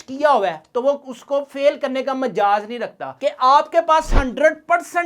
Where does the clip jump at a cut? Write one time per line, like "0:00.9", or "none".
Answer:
0:03.1